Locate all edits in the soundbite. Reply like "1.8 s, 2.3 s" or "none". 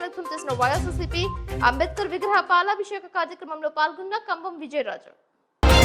none